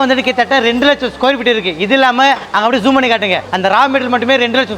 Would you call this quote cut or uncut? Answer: uncut